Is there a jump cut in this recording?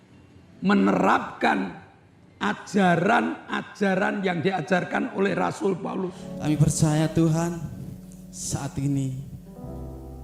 yes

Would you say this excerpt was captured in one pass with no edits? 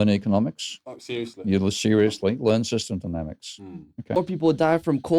no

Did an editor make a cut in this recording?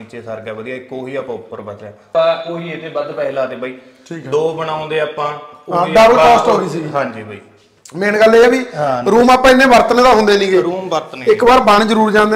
no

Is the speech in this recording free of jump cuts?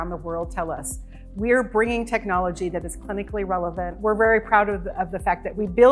no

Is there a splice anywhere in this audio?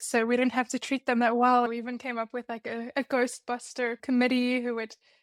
yes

